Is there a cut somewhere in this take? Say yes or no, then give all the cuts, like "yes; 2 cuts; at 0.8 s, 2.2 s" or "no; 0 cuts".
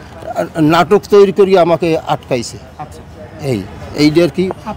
no; 0 cuts